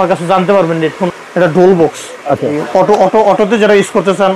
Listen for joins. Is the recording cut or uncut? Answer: cut